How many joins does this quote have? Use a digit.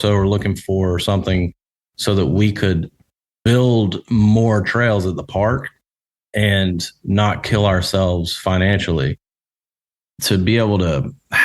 1